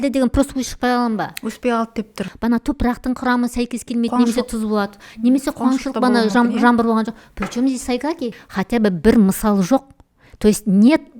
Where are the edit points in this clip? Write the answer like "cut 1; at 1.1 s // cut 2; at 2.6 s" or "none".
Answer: cut 1; at 2.3 s // cut 2; at 8.4 s